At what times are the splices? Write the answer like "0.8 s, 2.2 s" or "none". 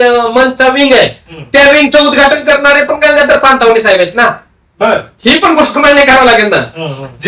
none